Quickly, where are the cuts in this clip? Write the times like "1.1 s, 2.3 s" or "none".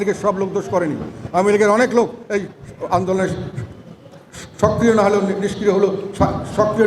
none